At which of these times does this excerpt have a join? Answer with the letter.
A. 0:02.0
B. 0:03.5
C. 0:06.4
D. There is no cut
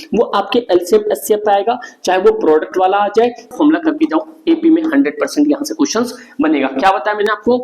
B